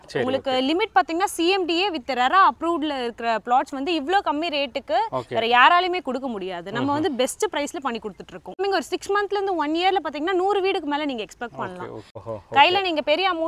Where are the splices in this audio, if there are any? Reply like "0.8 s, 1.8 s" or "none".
8.6 s, 12.2 s